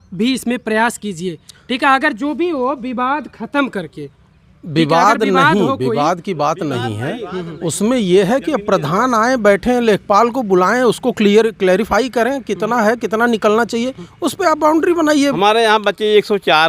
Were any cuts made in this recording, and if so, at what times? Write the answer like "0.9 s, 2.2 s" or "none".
15.4 s